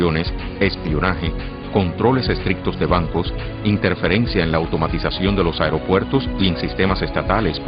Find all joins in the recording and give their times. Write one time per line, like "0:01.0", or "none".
none